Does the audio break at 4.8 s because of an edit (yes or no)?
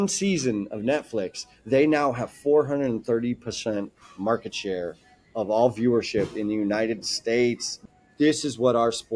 no